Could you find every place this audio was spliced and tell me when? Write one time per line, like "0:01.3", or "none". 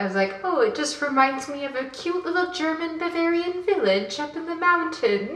none